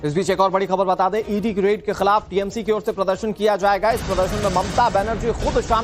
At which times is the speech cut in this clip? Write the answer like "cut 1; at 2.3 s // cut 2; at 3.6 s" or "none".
cut 1; at 1.1 s